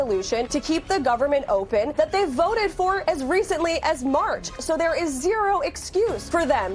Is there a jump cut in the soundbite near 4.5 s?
yes; 1 cut; at 4.5 s

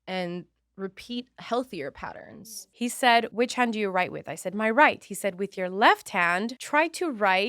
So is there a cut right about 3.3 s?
yes; 3 cuts; at 2.4 s, 3.3 s, 6.6 s

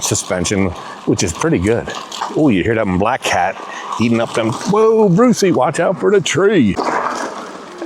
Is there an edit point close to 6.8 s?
yes; 2 cuts; at 2.1 s, 6.8 s

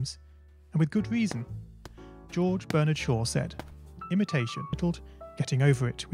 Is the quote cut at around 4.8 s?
yes; 1 cut; at 4.8 s

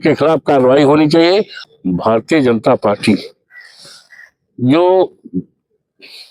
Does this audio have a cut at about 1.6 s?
yes; 1 cut; at 1.6 s

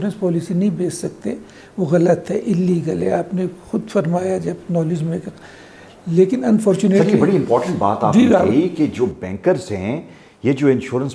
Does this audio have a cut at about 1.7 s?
no; 0 cuts

